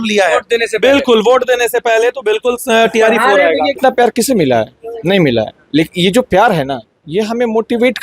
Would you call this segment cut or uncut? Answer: cut